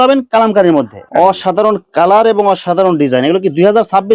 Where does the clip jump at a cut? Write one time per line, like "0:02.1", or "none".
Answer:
0:01.0